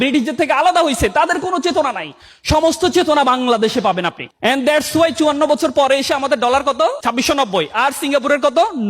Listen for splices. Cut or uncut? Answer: cut